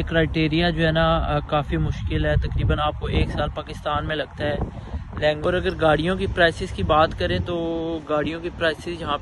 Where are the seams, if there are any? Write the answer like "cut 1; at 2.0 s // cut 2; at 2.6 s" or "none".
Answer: cut 1; at 5.4 s